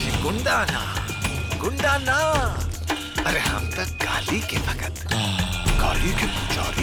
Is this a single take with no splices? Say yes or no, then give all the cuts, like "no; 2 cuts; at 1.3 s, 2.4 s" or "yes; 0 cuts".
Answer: yes; 0 cuts